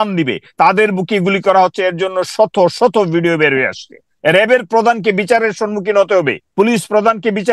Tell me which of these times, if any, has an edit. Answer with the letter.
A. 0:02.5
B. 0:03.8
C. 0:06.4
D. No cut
C